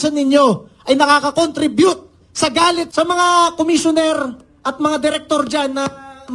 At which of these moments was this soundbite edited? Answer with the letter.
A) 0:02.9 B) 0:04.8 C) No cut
A